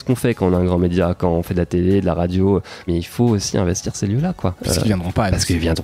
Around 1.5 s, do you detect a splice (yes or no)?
no